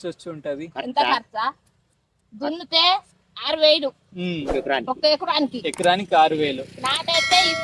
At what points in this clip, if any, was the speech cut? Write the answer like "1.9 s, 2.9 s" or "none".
none

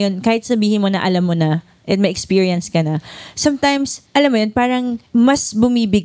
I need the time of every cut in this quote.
4.0 s, 5.0 s

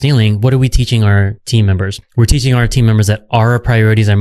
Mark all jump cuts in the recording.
none

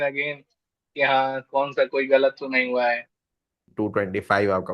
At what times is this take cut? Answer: 3.6 s

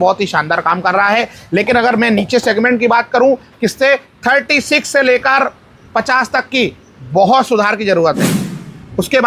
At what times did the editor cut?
none

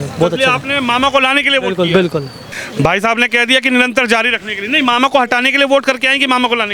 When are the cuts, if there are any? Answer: 2.5 s

